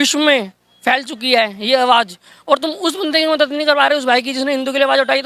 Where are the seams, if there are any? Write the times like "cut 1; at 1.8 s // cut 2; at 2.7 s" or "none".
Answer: none